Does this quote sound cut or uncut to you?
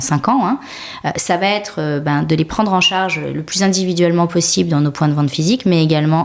uncut